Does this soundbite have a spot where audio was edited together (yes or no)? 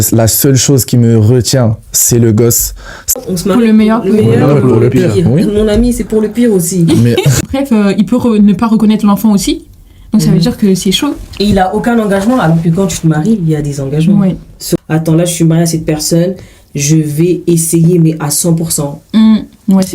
yes